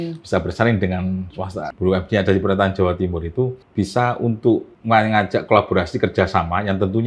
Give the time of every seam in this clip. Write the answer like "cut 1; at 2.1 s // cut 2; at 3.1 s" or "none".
cut 1; at 1.7 s // cut 2; at 3.6 s // cut 3; at 4.7 s